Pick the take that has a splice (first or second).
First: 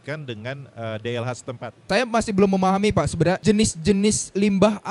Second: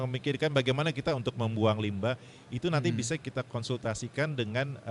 first